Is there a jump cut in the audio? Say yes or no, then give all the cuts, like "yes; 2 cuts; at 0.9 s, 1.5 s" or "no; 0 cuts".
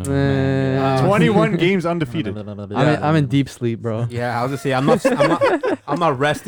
no; 0 cuts